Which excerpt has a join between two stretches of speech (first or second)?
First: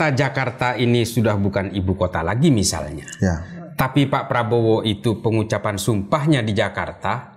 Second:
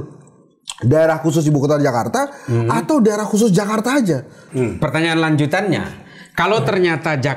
second